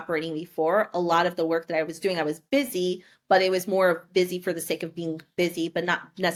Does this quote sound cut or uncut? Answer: uncut